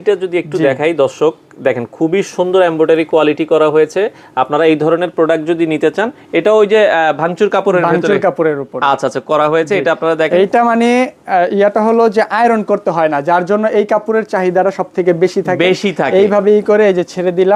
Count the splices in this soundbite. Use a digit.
0